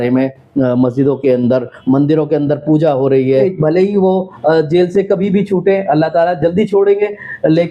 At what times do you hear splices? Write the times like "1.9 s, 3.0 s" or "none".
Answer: 3.3 s